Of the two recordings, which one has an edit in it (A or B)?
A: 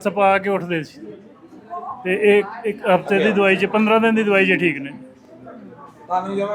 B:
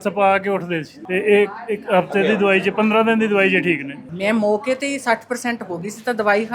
B